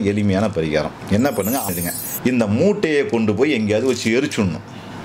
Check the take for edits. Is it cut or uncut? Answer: cut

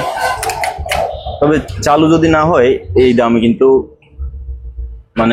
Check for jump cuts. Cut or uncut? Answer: uncut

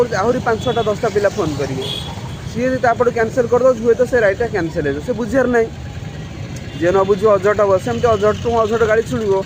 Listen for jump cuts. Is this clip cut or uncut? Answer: uncut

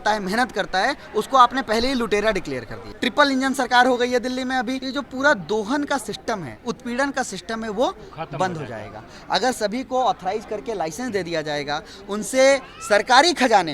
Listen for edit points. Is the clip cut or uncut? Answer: cut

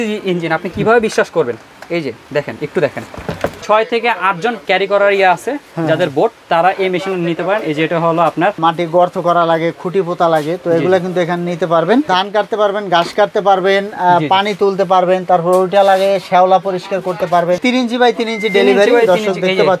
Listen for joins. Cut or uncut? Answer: cut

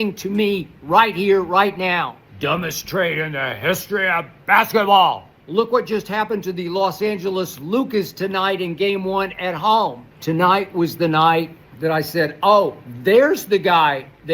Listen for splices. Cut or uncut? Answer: cut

